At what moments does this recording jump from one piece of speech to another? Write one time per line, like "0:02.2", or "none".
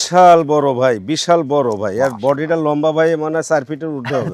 none